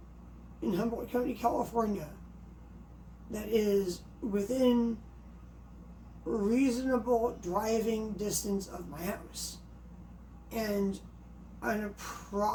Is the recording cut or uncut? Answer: uncut